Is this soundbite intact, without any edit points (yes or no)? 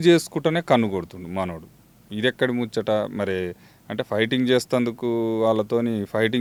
yes